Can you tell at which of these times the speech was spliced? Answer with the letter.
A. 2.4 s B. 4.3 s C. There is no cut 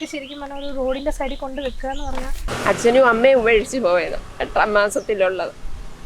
A